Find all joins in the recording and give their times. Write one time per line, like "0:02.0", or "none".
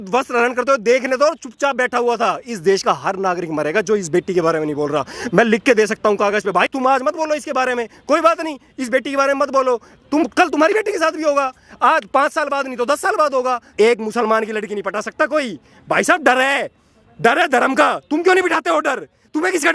0:13.7

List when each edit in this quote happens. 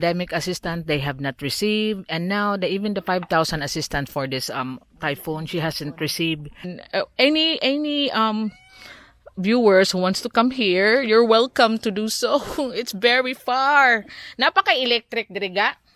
0:06.7

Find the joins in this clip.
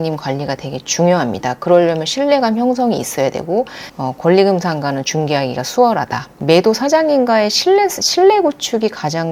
0:03.8
0:06.3

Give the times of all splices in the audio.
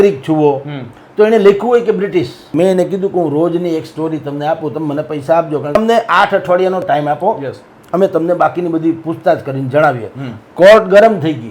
0:02.5
0:05.8

